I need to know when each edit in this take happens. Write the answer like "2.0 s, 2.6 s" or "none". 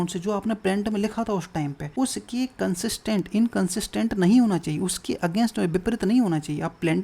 1.8 s